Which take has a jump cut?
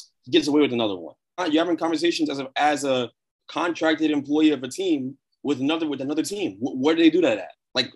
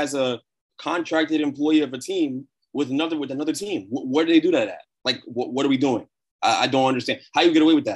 first; 1 cut; at 1.4 s

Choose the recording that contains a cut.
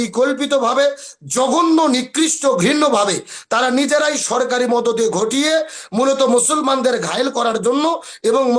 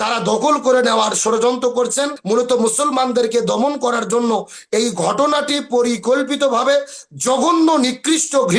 second; 1 cut; at 2.2 s

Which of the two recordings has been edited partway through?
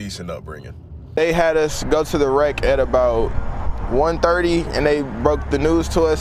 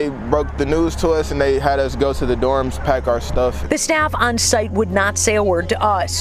first; 1 cut; at 1.2 s

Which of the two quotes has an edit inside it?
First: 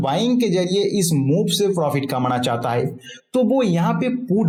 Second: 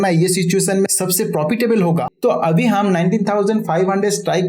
second; 1 cut; at 2.1 s

